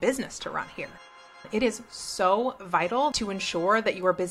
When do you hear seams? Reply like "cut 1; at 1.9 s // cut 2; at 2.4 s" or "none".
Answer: cut 1; at 1.4 s // cut 2; at 3.1 s

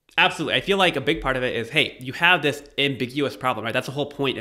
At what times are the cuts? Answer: none

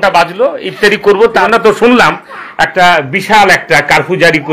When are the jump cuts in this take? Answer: none

